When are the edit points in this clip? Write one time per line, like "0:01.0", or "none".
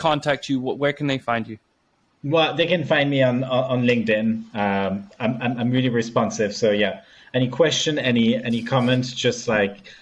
none